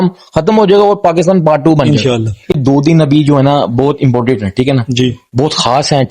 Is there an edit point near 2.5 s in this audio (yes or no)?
yes